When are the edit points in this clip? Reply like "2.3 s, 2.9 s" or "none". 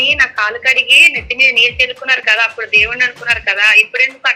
none

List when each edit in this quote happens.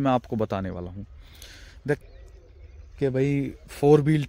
2.0 s

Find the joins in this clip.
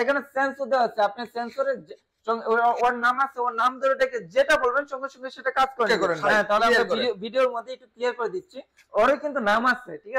5.9 s

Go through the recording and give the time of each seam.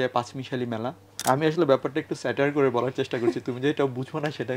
1.0 s

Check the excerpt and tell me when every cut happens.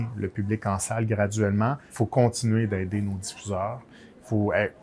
1.8 s

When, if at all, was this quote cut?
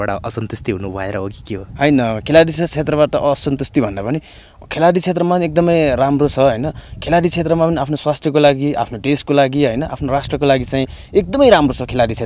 none

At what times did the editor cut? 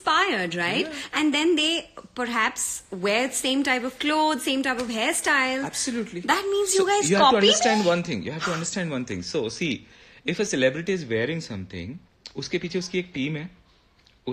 none

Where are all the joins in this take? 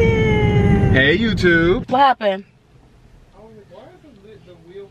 1.8 s

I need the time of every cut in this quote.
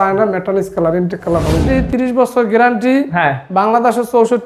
1.6 s

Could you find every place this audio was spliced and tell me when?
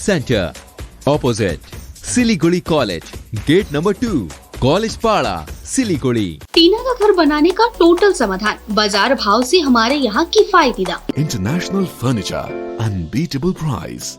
6.4 s, 11.1 s

